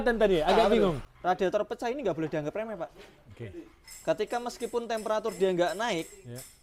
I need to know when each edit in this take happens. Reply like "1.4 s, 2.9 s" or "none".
1.1 s